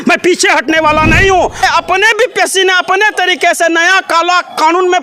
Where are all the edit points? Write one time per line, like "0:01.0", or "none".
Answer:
0:01.6